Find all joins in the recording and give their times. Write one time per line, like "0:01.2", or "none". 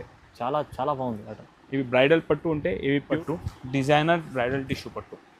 0:03.2